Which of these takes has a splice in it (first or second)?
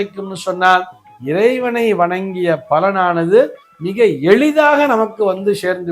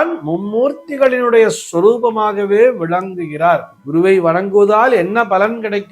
second